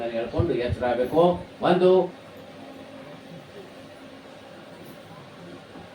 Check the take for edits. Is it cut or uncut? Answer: cut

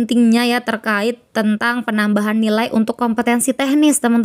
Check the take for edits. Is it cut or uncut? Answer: uncut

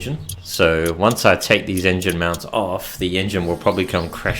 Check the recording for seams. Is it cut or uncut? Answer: uncut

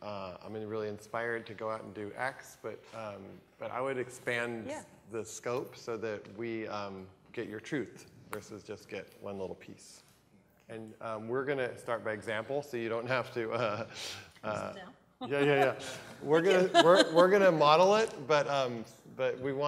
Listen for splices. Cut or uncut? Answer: cut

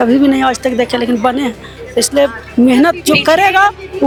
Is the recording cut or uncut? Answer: uncut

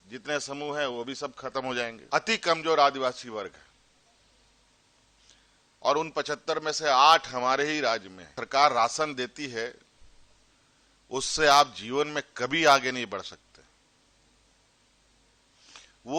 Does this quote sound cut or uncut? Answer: cut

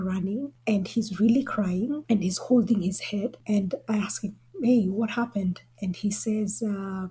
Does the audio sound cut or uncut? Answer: uncut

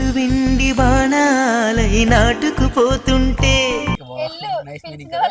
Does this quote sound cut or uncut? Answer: cut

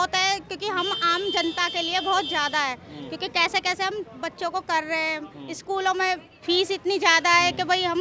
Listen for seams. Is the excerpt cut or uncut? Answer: uncut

